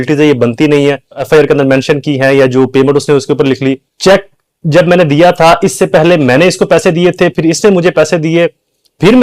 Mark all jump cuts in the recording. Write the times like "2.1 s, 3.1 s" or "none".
1.2 s, 3.9 s